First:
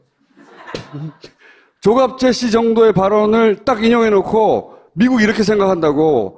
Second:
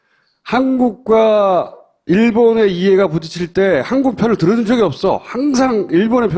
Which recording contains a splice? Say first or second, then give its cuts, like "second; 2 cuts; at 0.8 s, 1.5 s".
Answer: first; 1 cut; at 2.8 s